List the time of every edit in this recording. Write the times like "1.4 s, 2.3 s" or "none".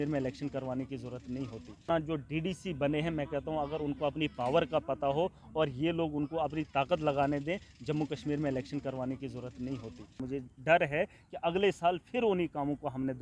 1.9 s, 10.2 s